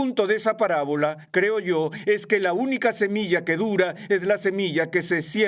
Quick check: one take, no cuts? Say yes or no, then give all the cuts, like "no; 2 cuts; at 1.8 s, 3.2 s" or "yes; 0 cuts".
yes; 0 cuts